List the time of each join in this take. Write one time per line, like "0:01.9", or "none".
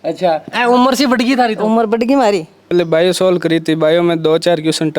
0:02.7